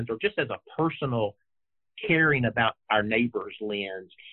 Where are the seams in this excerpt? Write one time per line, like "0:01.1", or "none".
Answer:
none